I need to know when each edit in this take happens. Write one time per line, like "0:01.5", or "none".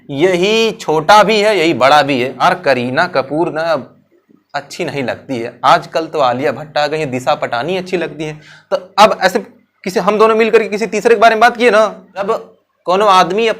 0:02.4
0:12.3